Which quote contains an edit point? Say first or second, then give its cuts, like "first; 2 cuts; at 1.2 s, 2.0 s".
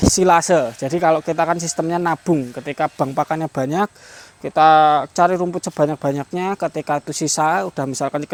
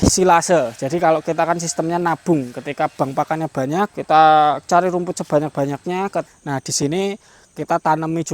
second; 2 cuts; at 4.0 s, 6.3 s